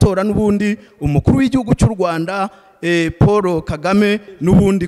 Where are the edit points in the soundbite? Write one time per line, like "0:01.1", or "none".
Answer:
none